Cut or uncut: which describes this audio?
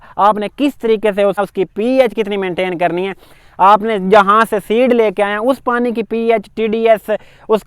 cut